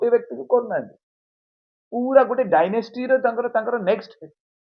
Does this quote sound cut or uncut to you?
uncut